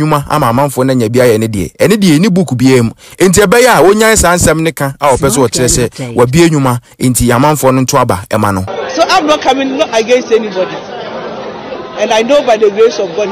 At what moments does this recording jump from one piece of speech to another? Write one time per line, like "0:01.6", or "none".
0:08.7